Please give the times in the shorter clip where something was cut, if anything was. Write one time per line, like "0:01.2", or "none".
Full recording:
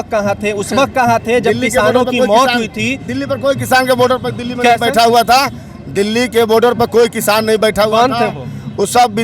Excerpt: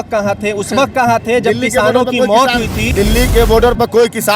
0:02.8